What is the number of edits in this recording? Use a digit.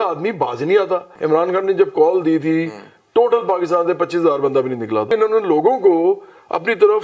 2